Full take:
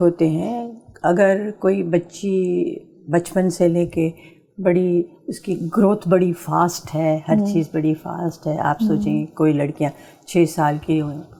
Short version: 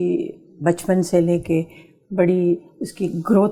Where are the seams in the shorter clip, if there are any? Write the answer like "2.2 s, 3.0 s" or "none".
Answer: none

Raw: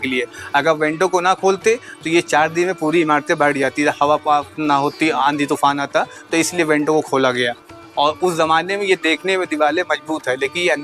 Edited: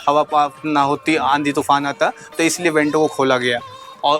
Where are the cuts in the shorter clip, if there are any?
none

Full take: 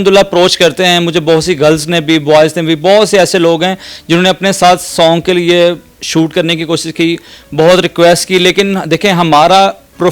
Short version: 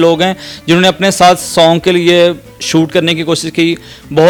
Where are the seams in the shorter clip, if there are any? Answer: none

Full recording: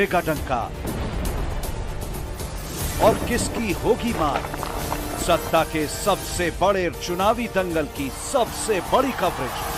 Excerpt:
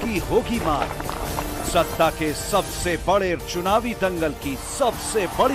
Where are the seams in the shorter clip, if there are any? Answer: none

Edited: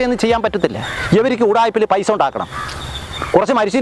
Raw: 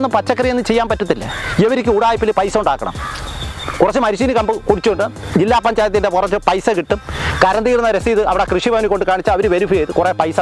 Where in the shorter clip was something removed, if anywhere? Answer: none

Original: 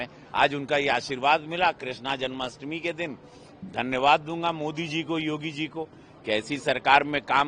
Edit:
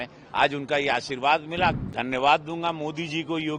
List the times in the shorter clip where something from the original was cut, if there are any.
1.8 s

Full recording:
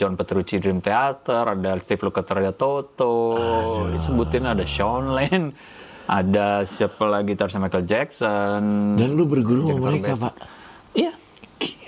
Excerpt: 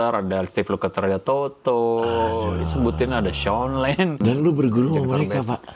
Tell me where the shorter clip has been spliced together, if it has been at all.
4.2 s

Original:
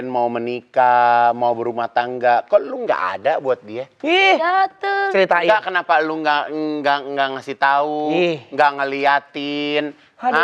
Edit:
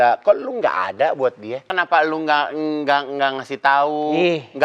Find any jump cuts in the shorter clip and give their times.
1.7 s

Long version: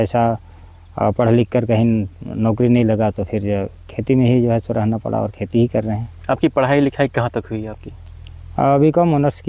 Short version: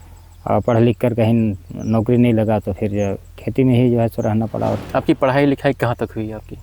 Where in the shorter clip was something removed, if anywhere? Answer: 4.8 s

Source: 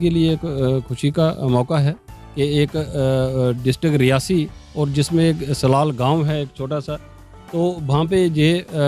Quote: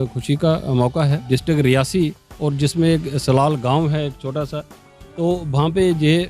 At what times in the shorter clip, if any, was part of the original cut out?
1.2 s

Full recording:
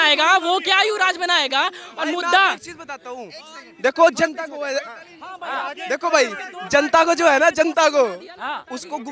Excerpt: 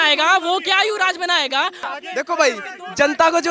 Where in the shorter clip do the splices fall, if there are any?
1.8 s

